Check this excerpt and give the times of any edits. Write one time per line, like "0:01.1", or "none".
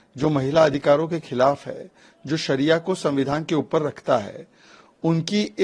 none